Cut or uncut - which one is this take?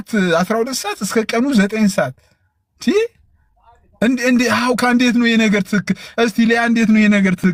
uncut